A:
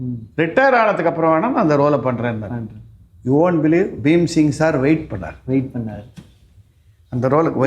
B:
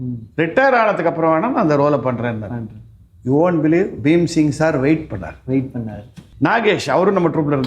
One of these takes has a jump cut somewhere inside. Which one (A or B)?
B